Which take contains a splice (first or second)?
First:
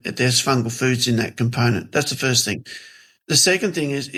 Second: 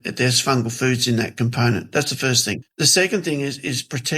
second